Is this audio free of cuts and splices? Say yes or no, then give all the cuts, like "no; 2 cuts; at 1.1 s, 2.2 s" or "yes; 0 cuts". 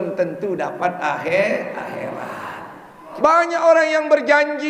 no; 1 cut; at 3.1 s